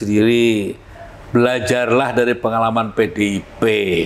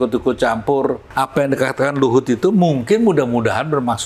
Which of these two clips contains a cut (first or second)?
second